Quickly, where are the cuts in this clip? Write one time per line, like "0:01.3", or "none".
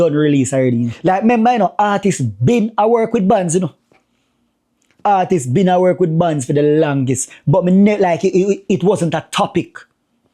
0:00.9